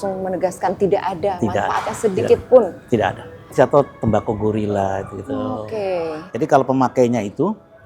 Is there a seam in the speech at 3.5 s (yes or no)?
yes